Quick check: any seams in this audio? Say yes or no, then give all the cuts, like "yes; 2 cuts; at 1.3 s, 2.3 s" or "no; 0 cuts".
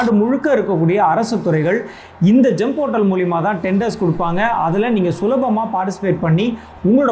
no; 0 cuts